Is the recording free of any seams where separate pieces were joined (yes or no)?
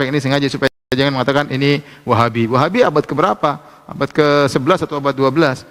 yes